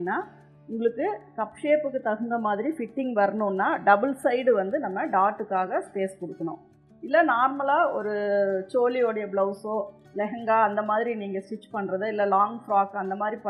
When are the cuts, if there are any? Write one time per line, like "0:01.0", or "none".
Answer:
none